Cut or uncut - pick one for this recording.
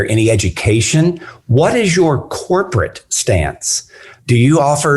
cut